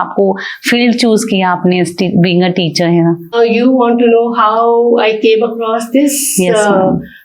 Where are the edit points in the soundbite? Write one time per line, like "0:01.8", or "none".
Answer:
0:03.3